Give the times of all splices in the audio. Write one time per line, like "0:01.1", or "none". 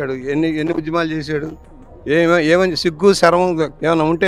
none